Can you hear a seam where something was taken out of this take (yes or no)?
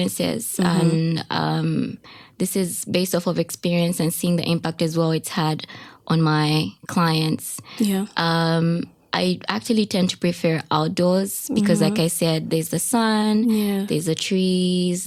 no